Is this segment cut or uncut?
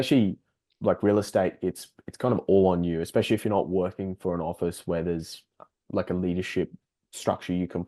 uncut